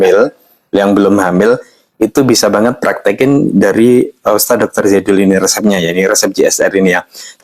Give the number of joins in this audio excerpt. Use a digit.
0